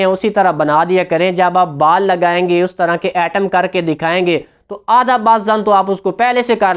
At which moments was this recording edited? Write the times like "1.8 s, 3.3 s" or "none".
none